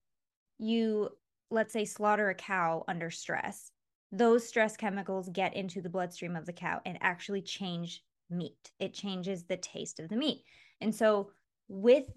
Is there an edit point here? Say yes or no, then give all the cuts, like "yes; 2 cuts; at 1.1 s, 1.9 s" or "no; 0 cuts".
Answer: no; 0 cuts